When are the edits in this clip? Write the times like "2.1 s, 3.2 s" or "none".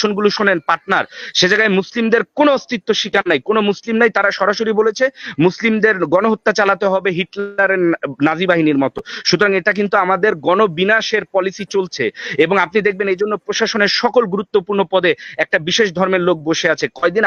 none